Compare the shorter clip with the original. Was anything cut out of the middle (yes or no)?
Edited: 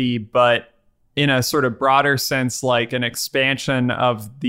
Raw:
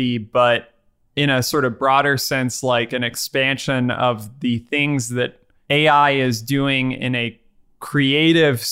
no